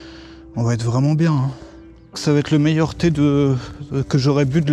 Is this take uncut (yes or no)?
no